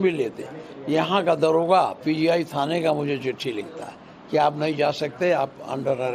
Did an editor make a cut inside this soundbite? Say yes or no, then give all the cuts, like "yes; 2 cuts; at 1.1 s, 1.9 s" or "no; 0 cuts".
no; 0 cuts